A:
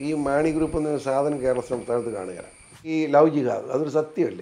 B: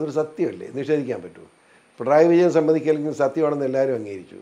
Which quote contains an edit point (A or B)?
A